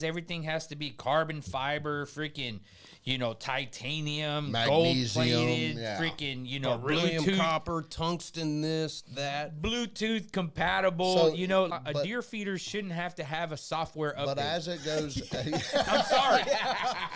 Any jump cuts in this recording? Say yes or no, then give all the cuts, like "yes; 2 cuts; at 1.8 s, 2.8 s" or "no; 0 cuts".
yes; 1 cut; at 11.7 s